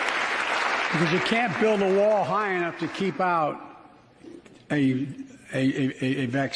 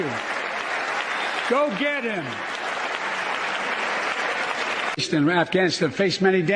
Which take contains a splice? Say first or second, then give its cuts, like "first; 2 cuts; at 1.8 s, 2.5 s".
second; 1 cut; at 4.9 s